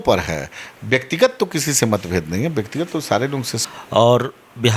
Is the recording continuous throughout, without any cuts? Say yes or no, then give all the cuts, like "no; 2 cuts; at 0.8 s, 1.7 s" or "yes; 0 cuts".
no; 1 cut; at 3.5 s